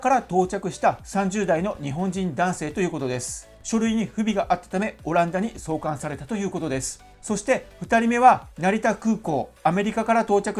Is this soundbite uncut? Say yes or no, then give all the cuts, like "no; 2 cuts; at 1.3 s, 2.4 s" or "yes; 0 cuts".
yes; 0 cuts